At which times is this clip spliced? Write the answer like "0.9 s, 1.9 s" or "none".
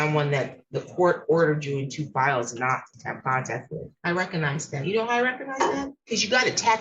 3.7 s